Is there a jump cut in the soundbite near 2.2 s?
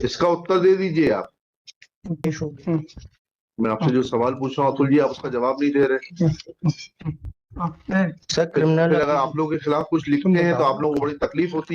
yes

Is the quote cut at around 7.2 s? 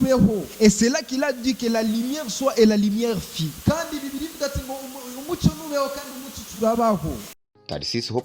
yes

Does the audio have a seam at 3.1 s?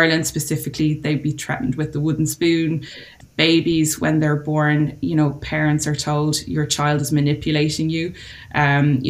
yes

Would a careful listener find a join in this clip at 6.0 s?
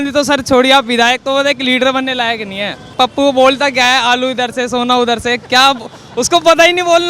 no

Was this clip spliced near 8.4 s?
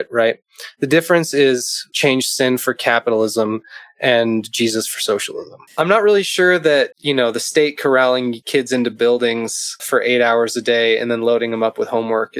yes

